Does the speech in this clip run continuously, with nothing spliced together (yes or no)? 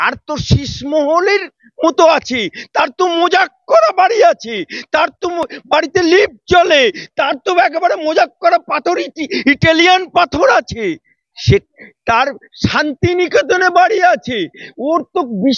yes